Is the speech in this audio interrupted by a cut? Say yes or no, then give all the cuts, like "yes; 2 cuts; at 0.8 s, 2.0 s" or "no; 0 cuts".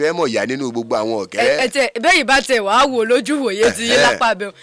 no; 0 cuts